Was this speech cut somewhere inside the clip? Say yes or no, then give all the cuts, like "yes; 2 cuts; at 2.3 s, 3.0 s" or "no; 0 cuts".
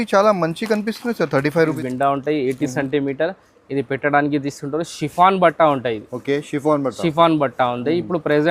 yes; 1 cut; at 1.8 s